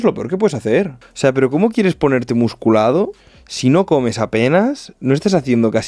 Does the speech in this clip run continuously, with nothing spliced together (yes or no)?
no